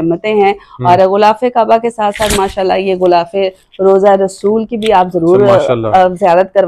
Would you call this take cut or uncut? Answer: uncut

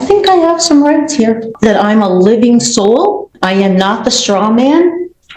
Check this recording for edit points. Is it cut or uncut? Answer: cut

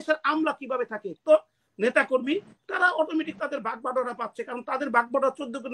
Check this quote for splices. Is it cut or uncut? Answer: cut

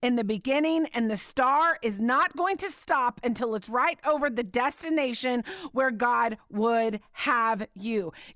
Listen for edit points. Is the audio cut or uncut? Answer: uncut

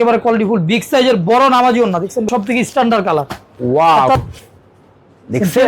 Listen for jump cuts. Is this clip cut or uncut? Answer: cut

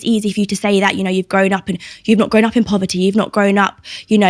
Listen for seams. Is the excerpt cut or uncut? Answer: uncut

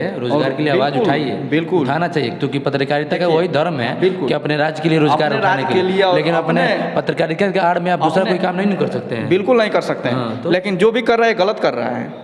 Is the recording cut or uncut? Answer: uncut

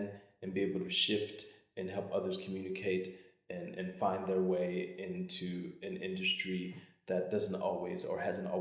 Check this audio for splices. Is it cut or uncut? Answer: uncut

